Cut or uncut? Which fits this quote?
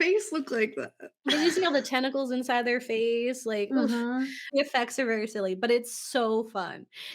cut